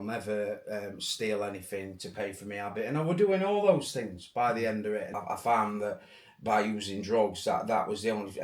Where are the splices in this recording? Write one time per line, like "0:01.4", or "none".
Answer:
0:05.2